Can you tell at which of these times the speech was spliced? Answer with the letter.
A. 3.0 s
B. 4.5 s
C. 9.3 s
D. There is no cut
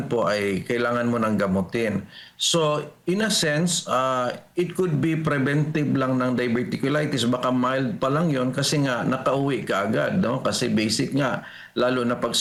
D